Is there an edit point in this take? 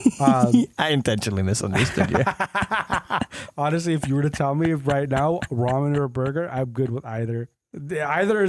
yes; 1 cut; at 7.6 s

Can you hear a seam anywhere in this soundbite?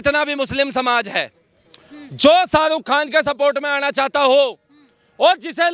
no; 0 cuts

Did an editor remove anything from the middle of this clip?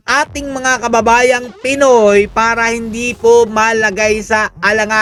no; 0 cuts

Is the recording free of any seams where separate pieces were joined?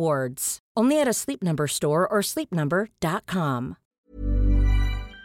no; 1 cut; at 3.9 s

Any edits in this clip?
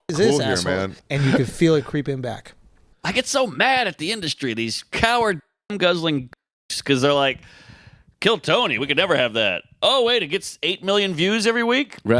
yes; 2 cuts; at 1.0 s, 2.9 s

